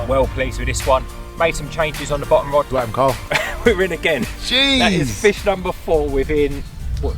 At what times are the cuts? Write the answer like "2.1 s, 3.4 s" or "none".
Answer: 2.7 s